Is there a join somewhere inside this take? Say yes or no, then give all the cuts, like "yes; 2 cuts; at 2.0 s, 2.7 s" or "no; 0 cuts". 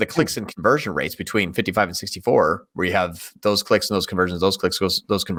no; 0 cuts